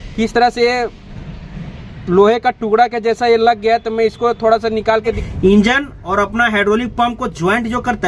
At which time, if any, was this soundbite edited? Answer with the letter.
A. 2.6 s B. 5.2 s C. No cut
B